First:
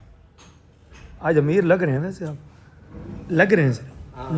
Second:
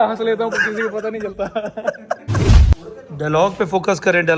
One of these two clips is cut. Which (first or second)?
second